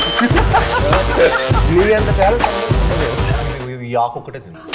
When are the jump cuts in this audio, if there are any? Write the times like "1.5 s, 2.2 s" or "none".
3.4 s